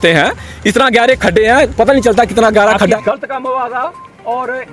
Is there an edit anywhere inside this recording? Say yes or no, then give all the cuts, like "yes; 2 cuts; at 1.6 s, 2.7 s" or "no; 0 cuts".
yes; 1 cut; at 3.0 s